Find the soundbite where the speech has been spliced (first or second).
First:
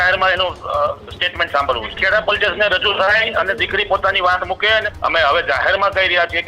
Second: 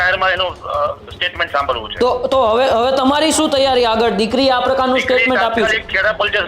first